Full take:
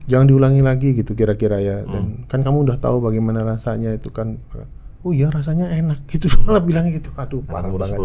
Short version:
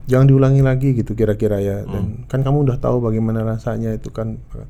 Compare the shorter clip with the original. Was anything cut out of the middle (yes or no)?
no